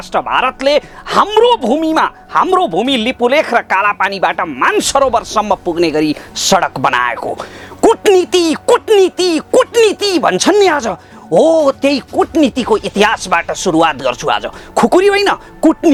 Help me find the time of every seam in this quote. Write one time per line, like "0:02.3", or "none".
none